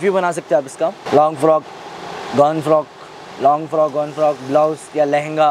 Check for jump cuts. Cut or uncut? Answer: uncut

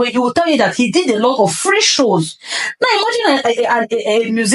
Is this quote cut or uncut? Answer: uncut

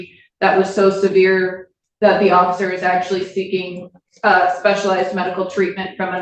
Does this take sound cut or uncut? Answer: uncut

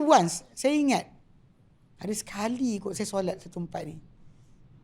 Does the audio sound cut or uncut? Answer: uncut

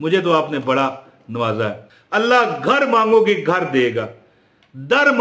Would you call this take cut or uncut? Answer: cut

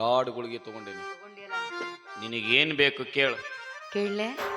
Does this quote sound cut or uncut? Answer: uncut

